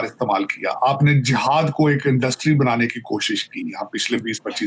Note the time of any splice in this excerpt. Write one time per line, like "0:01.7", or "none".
none